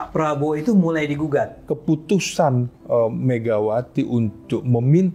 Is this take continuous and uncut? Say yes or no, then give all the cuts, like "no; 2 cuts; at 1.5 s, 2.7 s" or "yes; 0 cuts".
no; 1 cut; at 1.6 s